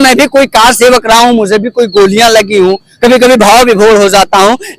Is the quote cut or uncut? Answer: uncut